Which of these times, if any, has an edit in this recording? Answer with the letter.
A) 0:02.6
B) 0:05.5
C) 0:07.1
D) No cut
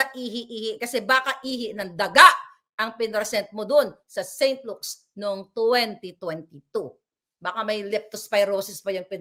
D